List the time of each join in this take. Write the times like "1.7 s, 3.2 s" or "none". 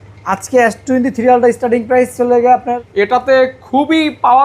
2.8 s

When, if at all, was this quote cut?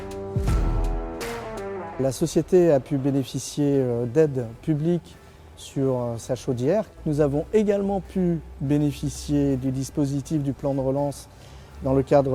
1.9 s

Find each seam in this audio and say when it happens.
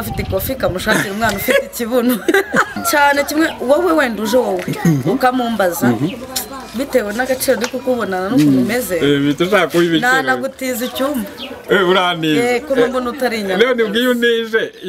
2.8 s

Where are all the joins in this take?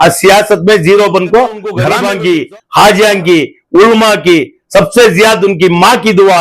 1.9 s

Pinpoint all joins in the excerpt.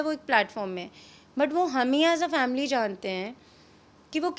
none

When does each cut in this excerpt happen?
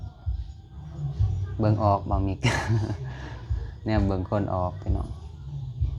none

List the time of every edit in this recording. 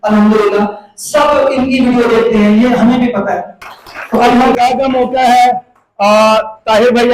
4.5 s

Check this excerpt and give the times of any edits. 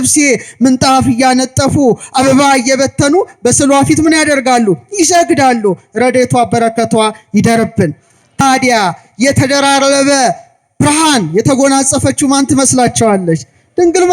8.4 s

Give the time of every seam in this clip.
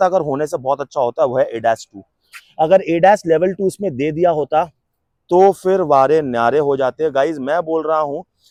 none

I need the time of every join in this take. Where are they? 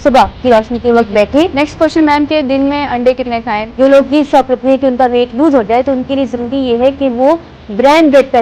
1.5 s, 3.6 s

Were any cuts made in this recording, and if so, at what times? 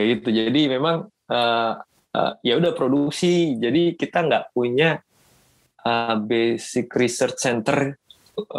none

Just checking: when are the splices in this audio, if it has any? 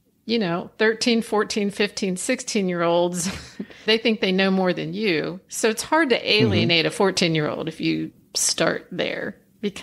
3.8 s

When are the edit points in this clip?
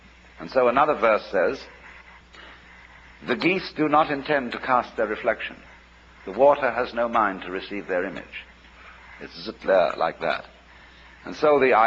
8.1 s

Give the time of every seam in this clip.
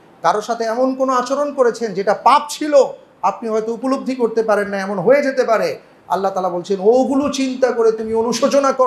none

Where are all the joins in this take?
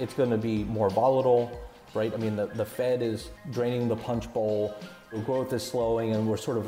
1.8 s, 3.4 s, 5.2 s

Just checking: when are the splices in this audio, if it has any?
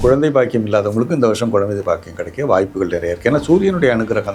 none

